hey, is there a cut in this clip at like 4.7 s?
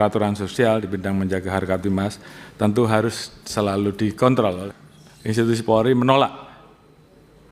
yes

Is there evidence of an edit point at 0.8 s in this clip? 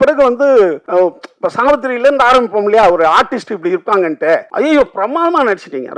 yes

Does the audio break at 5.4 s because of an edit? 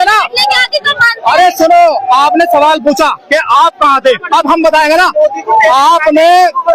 no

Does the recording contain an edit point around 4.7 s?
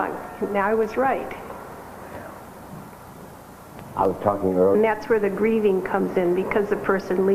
no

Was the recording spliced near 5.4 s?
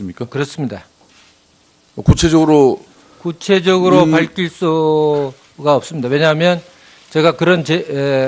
yes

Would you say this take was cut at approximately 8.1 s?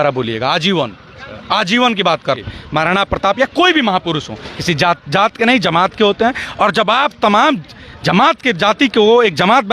no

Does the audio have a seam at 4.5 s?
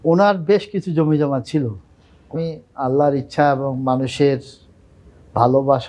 no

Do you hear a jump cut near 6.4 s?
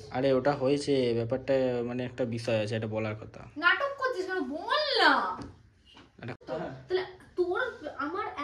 yes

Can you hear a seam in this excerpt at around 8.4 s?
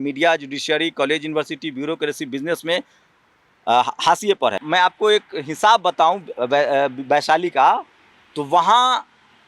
no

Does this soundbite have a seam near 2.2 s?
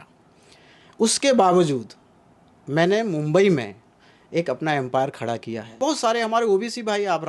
no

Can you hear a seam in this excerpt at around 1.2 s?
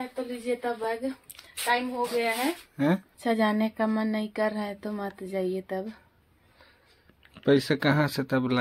no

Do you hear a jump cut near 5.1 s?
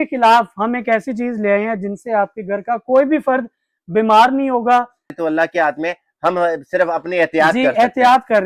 yes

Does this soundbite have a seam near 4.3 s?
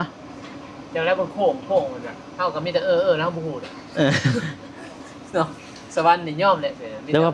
no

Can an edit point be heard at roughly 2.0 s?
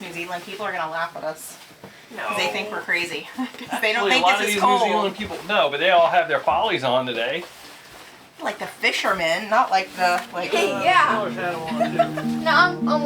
no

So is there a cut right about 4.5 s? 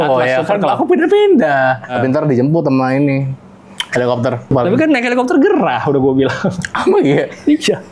yes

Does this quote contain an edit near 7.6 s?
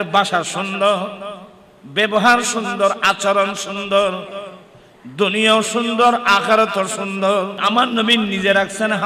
yes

